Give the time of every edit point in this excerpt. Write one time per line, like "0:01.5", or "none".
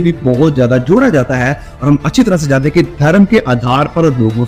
none

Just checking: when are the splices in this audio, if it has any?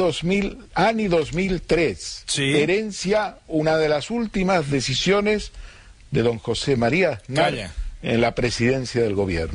none

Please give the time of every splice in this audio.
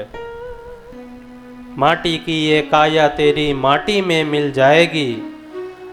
0:00.9

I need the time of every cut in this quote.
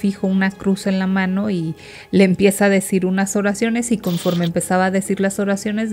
none

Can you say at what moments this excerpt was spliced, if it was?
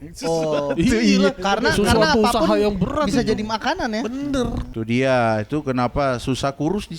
0:04.7

